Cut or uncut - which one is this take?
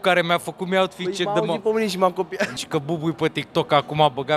cut